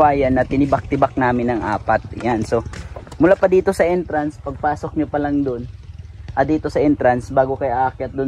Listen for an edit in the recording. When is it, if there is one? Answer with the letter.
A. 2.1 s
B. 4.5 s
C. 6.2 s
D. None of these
D